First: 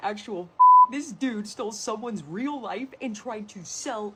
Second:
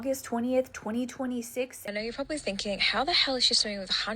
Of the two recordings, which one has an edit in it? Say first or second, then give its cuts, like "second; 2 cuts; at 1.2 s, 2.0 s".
second; 1 cut; at 1.8 s